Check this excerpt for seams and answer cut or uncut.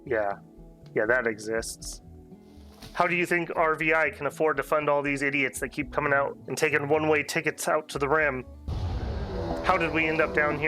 cut